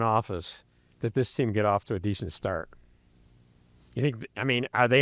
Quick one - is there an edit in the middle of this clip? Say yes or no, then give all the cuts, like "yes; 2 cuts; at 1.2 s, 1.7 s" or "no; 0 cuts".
no; 0 cuts